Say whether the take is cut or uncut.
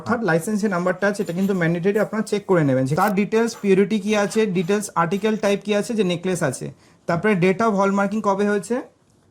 cut